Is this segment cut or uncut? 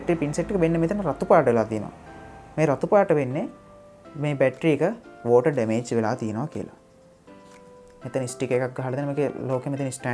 uncut